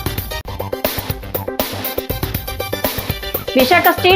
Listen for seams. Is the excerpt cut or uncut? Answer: uncut